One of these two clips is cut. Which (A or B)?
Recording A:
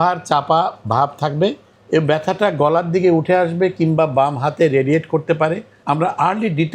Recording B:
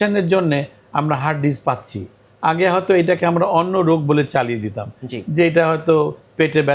A